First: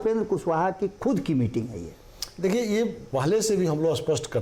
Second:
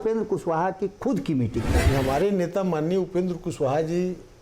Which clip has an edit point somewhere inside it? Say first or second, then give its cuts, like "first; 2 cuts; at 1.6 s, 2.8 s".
second; 1 cut; at 1.8 s